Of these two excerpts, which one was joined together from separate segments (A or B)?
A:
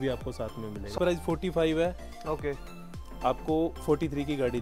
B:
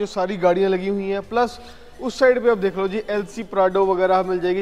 A